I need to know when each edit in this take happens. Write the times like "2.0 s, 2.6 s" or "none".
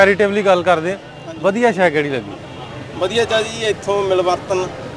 none